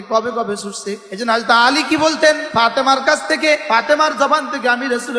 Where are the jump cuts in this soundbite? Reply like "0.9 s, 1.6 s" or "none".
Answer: 1.1 s, 2.4 s, 3.6 s